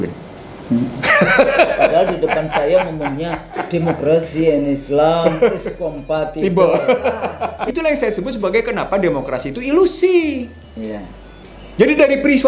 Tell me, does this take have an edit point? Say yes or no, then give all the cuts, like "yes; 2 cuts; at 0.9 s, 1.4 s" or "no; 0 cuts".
yes; 1 cut; at 7.6 s